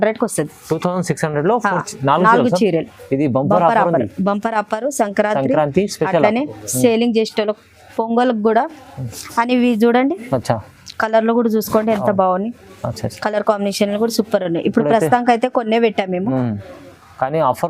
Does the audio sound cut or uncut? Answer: uncut